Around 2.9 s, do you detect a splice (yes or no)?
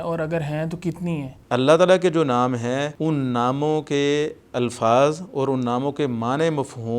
yes